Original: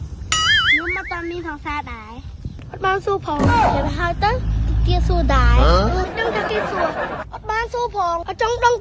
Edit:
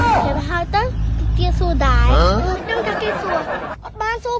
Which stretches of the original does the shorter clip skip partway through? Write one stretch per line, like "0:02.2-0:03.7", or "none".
none

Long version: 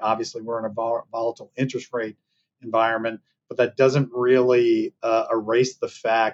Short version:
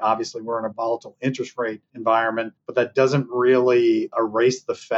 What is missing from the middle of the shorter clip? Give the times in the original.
0:00.7-0:01.1
0:02.2-0:02.5
0:03.3-0:03.4
0:04.9-0:05.3

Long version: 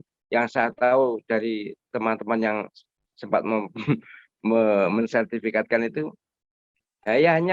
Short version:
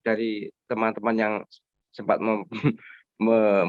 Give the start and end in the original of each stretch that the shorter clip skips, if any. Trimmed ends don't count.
none

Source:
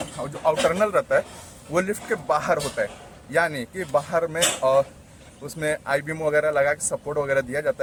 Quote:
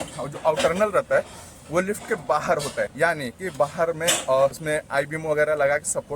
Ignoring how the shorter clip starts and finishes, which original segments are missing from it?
0:02.9-0:03.3
0:04.9-0:05.6

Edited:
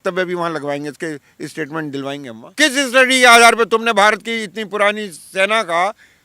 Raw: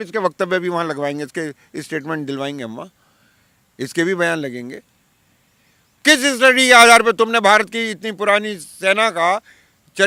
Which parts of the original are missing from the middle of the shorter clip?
0:02.7-0:05.9

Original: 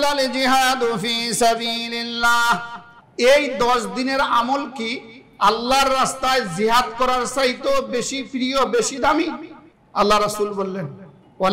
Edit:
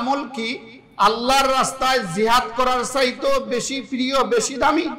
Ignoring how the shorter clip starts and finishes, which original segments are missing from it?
none

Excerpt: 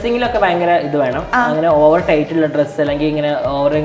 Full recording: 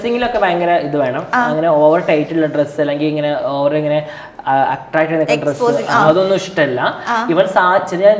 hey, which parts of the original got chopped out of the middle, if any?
none

